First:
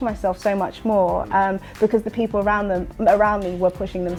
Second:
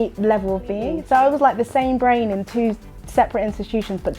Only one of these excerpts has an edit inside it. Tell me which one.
second; 1 cut; at 0.9 s

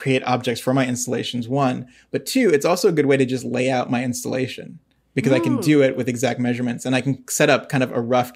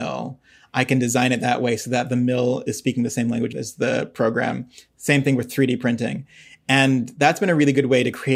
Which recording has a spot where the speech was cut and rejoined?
second; 1 cut; at 3.5 s

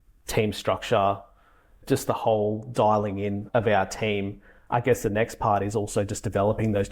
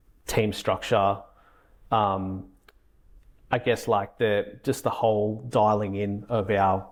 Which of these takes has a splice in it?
first; 3 cuts; at 1.8 s, 3.4 s, 4.5 s

